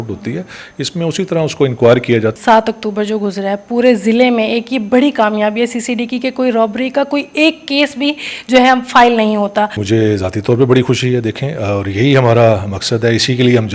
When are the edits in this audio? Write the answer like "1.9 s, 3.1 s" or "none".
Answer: 2.4 s, 9.8 s